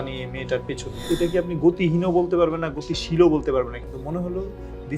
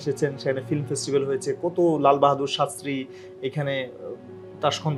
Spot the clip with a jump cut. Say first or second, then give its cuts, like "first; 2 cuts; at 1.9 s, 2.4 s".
first; 1 cut; at 1.1 s